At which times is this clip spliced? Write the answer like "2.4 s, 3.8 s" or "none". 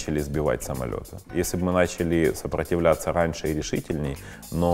1.1 s